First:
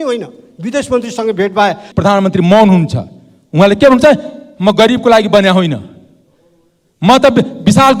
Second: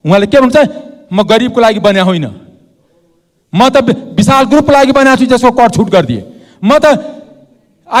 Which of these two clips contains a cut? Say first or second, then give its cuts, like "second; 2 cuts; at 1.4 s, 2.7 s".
first; 1 cut; at 1.9 s